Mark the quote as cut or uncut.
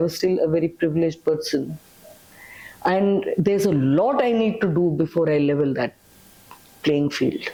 uncut